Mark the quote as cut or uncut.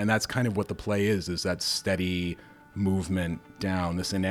uncut